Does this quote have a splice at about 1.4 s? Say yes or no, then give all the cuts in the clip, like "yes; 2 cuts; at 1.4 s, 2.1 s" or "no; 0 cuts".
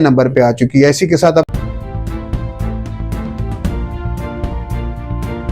yes; 1 cut; at 1.4 s